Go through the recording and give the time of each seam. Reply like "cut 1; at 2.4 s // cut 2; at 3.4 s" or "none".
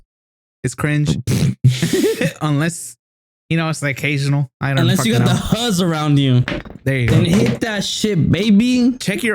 none